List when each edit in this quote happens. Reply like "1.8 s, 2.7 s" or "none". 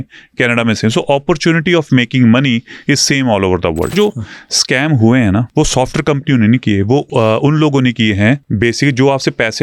3.9 s, 5.5 s, 7.1 s, 8.5 s